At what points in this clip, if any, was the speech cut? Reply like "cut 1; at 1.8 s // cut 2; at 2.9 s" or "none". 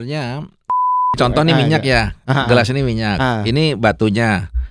cut 1; at 1.0 s